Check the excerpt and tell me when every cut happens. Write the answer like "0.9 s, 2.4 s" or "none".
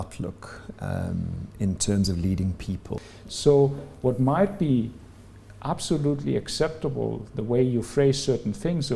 2.9 s